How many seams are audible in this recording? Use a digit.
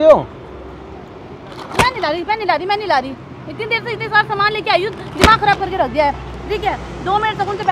0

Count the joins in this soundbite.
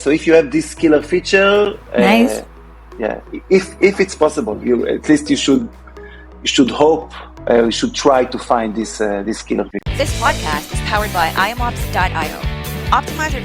1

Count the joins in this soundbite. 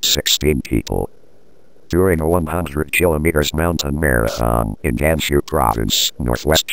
0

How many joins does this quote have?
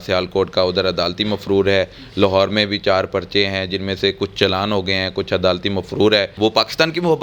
1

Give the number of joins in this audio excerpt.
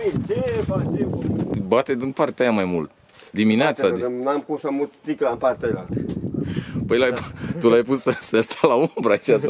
1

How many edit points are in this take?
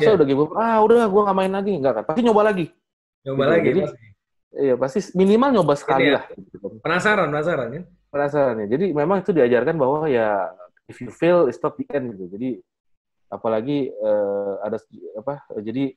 0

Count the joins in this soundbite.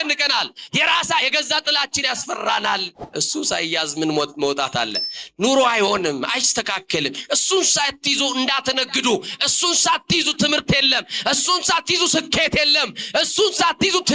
0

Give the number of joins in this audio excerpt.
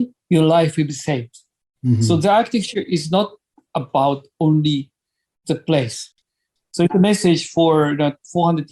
1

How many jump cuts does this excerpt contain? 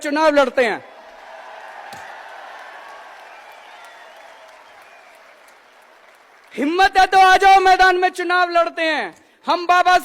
0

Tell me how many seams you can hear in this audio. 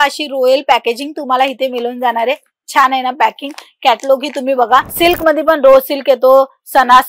1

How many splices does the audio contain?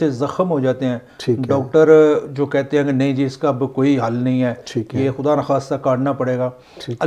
0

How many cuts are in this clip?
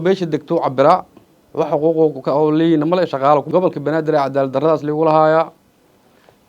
1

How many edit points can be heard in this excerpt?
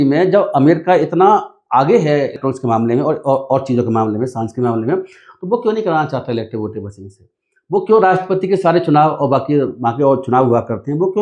1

